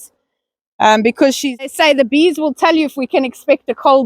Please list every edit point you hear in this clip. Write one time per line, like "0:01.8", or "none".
0:01.7